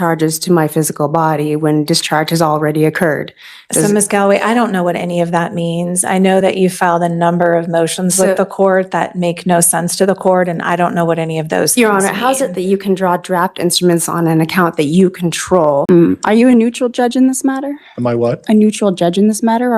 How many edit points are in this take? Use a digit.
1